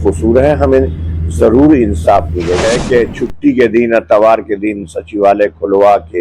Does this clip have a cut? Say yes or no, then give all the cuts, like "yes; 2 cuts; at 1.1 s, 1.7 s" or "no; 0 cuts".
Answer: yes; 1 cut; at 2.6 s